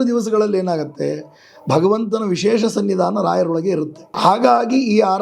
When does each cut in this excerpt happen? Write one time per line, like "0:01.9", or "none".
0:04.0